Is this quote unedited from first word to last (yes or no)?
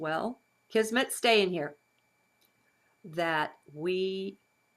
no